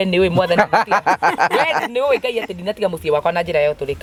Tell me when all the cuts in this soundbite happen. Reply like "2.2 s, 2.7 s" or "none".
none